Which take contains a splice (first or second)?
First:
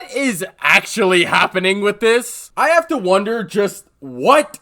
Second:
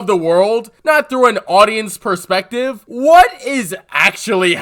first